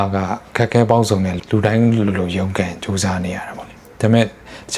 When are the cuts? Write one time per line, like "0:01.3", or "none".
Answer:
0:01.4